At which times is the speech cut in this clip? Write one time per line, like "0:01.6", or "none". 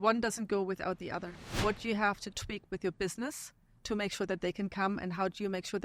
0:01.4